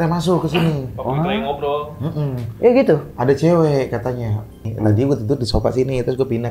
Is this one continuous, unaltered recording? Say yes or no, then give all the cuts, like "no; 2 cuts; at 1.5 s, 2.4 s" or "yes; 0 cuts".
no; 1 cut; at 4.6 s